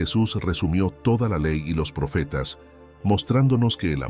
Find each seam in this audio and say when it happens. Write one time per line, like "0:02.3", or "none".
none